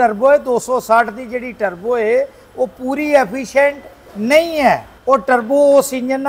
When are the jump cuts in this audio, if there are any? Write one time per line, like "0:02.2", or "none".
0:04.9

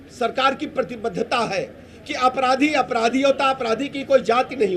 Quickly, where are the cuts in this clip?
none

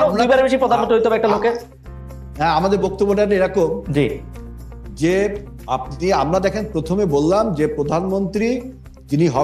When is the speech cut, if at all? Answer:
none

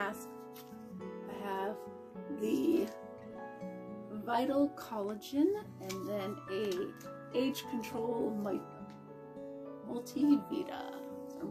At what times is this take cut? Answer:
0:08.6
0:09.8

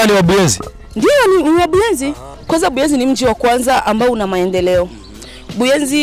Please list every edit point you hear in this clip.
0:02.3

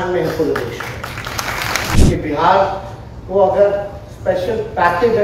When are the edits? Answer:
0:01.9

